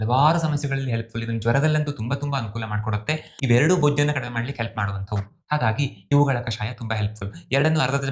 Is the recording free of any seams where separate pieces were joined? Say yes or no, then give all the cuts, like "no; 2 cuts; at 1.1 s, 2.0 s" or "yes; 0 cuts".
no; 1 cut; at 3.3 s